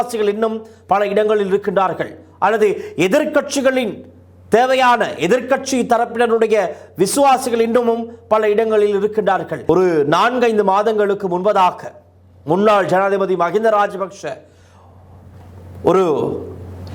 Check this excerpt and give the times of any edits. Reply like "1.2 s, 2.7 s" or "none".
9.5 s